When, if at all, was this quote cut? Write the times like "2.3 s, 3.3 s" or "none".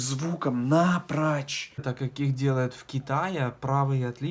2.0 s